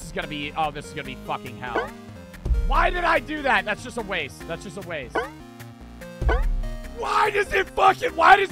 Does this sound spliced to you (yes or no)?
no